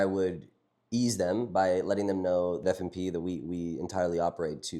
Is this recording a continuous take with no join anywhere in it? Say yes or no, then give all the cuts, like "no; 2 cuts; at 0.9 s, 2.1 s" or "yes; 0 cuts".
no; 1 cut; at 2.6 s